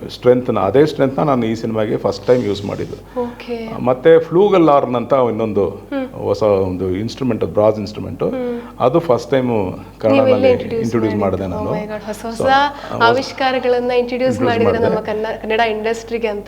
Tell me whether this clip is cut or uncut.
uncut